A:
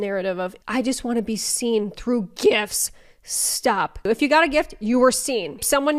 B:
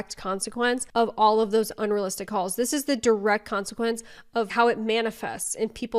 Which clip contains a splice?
B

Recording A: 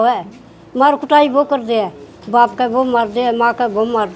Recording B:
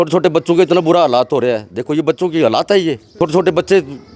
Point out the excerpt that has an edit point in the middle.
B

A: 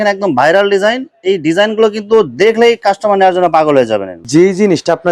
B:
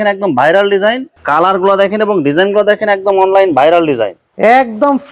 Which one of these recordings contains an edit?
B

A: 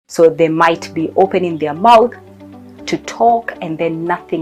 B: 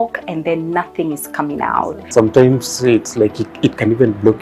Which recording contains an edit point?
B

